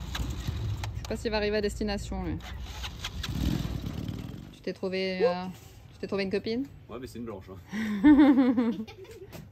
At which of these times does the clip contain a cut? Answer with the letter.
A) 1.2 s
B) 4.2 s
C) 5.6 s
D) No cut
B